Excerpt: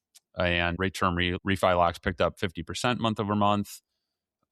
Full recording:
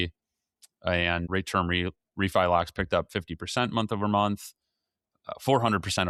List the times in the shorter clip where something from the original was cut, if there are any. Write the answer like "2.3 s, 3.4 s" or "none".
1.1 s